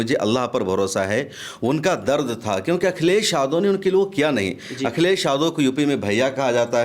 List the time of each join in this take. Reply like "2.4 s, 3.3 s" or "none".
none